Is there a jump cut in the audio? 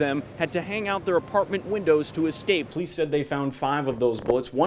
yes; 1 cut; at 2.8 s

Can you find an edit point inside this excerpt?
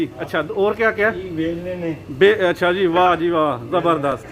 no; 0 cuts

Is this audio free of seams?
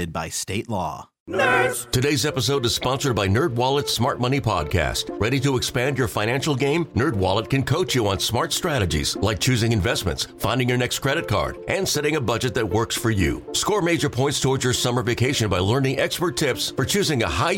no; 1 cut; at 1.1 s

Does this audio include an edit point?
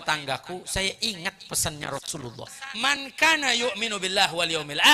yes; 1 cut; at 3.0 s

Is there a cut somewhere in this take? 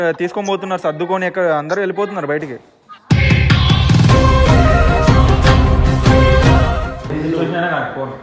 yes; 1 cut; at 7.0 s

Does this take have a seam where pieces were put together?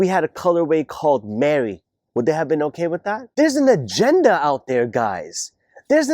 yes; 1 cut; at 3.2 s

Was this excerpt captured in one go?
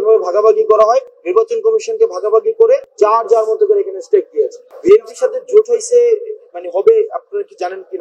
no; 3 cuts; at 1.2 s, 2.9 s, 4.6 s

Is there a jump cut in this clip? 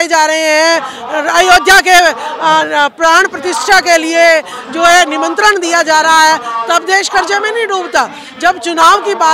no; 0 cuts

